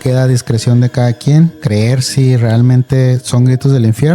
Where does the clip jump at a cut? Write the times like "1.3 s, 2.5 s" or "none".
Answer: 1.6 s